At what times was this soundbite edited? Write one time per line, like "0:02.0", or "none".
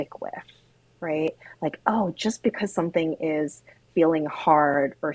none